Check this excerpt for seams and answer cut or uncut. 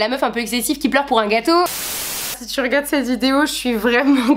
cut